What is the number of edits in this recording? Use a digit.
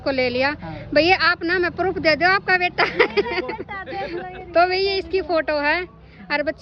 0